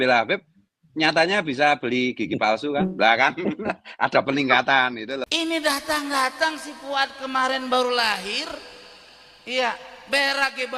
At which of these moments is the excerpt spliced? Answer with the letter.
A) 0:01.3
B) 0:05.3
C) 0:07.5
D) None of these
B